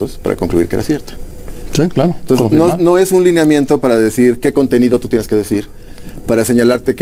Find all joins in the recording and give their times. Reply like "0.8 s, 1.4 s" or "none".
none